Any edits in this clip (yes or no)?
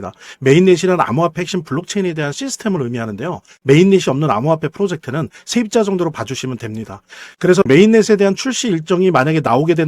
yes